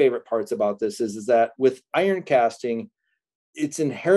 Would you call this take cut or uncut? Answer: uncut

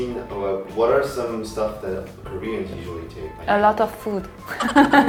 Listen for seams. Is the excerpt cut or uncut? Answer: uncut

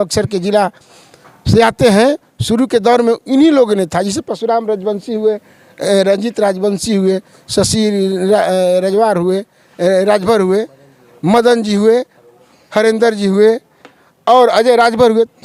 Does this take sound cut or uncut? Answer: uncut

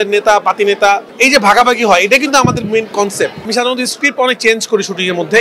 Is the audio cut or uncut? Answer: cut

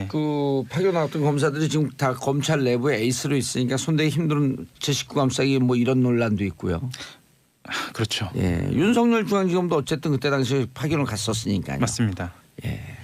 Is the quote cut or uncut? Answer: uncut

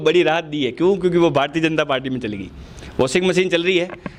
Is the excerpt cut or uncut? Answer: uncut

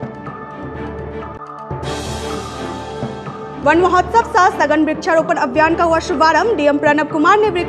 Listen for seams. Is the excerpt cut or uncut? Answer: uncut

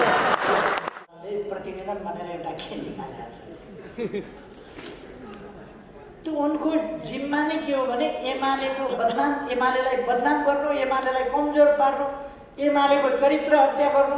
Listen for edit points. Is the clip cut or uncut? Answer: cut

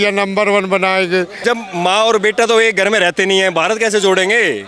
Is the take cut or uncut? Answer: cut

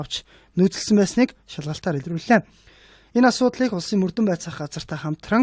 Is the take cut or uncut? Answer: cut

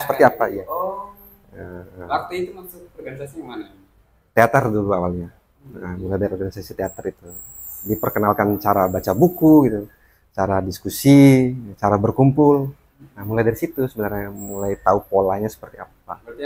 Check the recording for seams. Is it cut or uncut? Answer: uncut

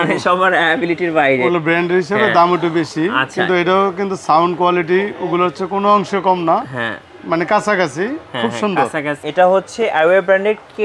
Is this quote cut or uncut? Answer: cut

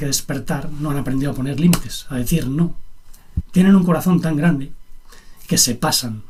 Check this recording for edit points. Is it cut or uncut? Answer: uncut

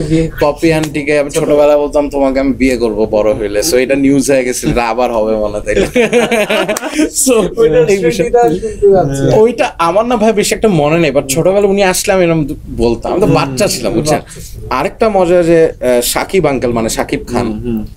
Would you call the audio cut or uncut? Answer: uncut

